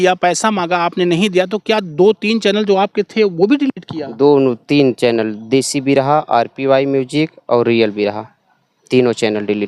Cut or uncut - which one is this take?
uncut